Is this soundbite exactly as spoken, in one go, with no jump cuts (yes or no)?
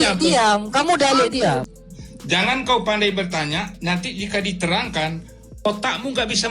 no